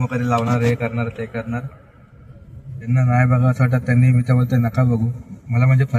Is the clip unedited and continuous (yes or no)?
no